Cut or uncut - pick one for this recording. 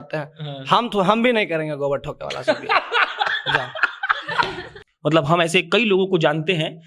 cut